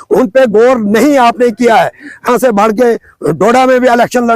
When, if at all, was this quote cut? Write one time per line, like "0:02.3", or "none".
0:02.3